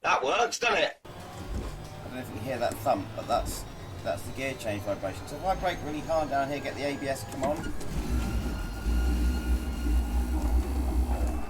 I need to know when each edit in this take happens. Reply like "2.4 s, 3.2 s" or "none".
1.1 s